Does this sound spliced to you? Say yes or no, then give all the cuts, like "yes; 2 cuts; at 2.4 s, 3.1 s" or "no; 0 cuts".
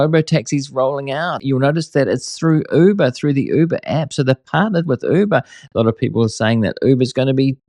yes; 1 cut; at 1.4 s